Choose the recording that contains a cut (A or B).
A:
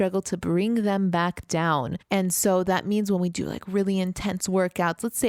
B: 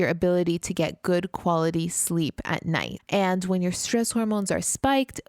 B